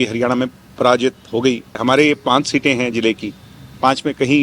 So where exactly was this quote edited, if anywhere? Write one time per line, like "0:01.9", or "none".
0:01.8